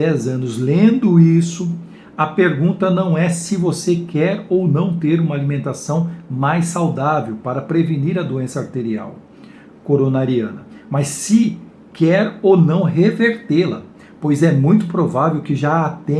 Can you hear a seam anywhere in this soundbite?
no; 0 cuts

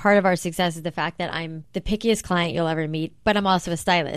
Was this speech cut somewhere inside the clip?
yes; 1 cut; at 1.6 s

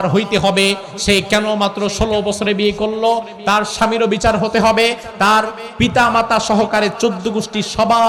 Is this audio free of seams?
yes; 0 cuts

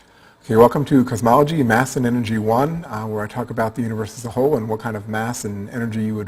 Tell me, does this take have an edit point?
no; 0 cuts

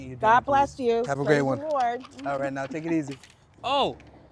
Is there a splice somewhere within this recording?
no; 0 cuts

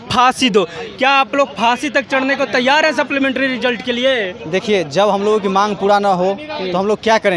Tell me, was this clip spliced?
no; 0 cuts

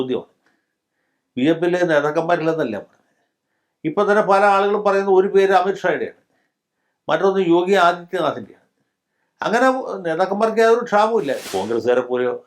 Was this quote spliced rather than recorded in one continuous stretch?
yes; 1 cut; at 11.4 s

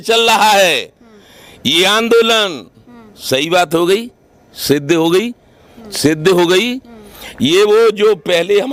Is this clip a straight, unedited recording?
yes; 0 cuts

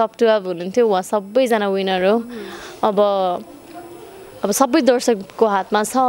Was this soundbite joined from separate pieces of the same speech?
no; 0 cuts

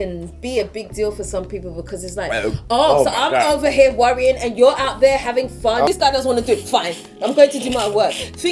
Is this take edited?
yes; 1 cut; at 5.9 s

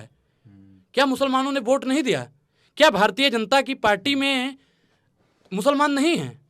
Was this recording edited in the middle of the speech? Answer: no; 0 cuts

